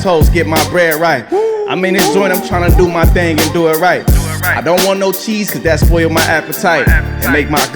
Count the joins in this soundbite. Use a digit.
1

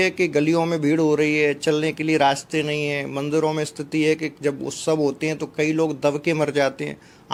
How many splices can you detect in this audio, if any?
0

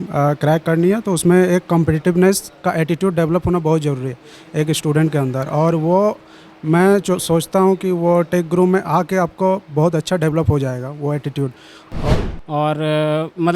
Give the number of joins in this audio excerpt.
1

